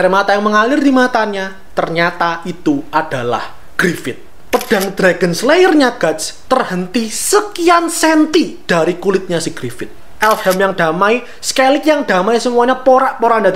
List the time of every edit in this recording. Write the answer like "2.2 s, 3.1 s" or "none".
3.6 s, 4.3 s, 10.0 s